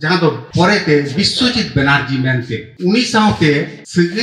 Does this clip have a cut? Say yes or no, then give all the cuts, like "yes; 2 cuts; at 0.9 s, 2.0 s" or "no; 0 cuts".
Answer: yes; 1 cut; at 2.6 s